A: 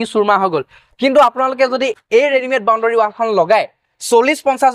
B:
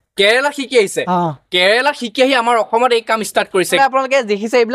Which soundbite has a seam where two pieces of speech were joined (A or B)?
B